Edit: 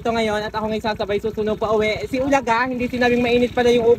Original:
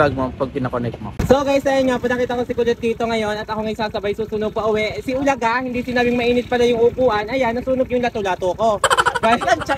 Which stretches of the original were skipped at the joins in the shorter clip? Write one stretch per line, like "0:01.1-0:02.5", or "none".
none